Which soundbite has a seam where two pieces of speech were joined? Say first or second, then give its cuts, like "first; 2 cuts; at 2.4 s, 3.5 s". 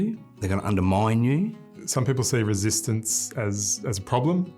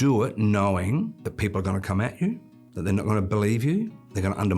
first; 1 cut; at 1.8 s